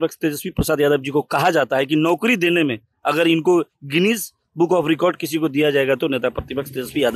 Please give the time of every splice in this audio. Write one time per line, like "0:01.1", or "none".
none